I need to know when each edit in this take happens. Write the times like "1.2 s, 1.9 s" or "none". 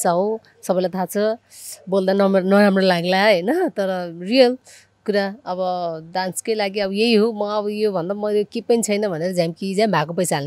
none